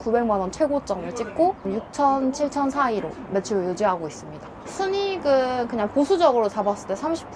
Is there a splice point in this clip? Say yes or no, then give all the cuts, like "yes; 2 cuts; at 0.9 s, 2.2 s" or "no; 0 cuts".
yes; 1 cut; at 4.7 s